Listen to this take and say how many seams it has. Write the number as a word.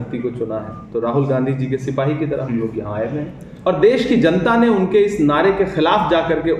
one